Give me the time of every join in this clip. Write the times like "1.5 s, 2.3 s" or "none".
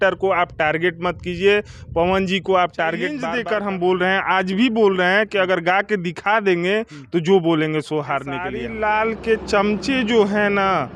3.2 s, 8.6 s